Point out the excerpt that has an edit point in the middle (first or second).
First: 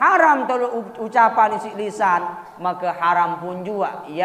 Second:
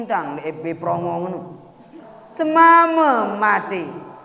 second